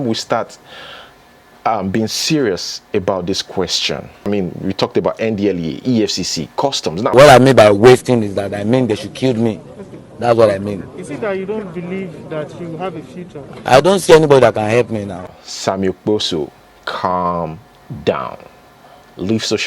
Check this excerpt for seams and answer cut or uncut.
cut